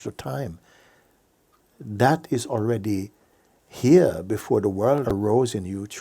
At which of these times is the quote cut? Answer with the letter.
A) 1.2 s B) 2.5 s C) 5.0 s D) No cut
C